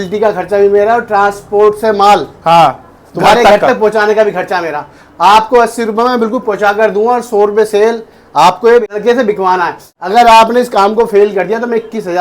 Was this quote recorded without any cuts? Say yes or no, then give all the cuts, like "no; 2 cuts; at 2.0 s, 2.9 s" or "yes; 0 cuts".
no; 2 cuts; at 8.8 s, 9.9 s